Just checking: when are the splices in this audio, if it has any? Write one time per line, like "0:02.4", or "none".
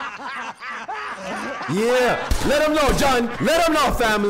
0:03.3

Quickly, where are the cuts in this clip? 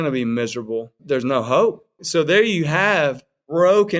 0:00.9
0:01.9

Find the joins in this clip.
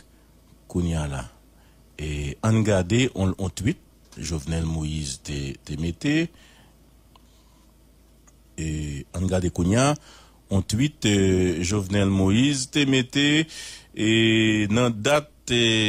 0:06.8

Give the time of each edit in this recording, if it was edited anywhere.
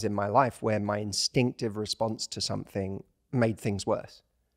0:03.1

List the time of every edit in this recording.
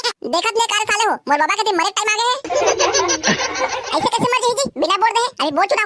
none

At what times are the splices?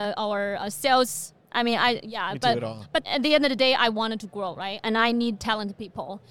0:03.0

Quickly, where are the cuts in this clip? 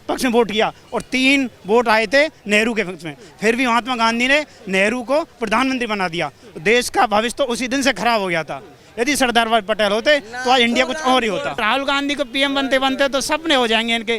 0:11.6

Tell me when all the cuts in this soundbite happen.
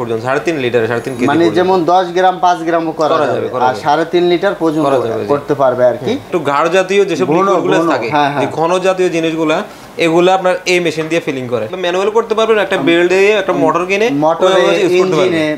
0:06.3
0:11.7

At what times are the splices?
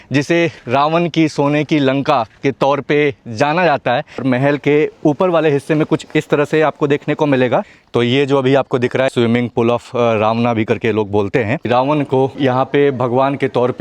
0:04.2
0:07.8
0:09.1
0:11.7

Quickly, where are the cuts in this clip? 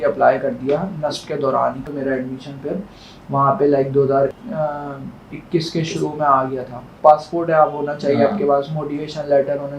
0:01.9
0:04.4
0:06.9

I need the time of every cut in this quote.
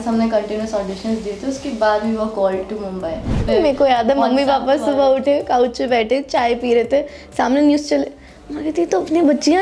0:03.4

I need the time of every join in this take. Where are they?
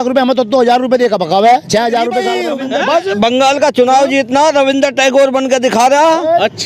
0:02.4

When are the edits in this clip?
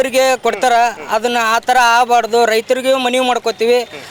none

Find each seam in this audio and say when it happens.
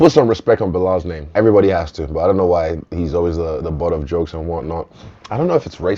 none

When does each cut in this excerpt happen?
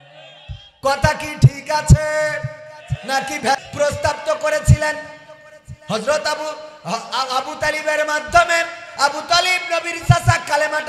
0:03.7

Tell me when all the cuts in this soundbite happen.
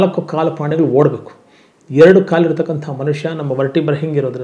none

